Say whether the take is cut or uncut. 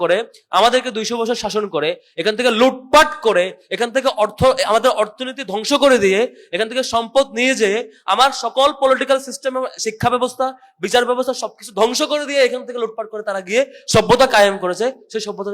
uncut